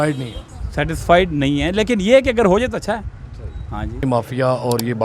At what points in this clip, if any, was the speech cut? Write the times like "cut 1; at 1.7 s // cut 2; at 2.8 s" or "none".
none